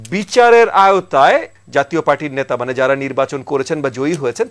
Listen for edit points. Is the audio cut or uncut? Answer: cut